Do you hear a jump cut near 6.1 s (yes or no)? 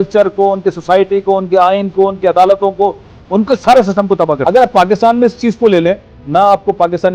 yes